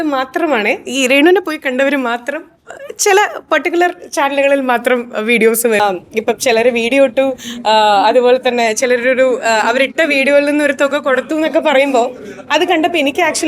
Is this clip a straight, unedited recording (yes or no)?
no